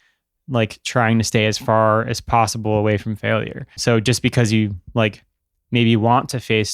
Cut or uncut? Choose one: cut